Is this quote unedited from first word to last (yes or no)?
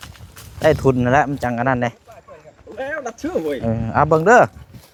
yes